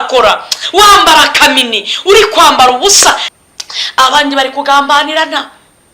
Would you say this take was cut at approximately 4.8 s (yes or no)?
no